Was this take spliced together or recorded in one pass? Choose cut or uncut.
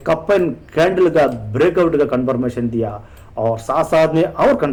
uncut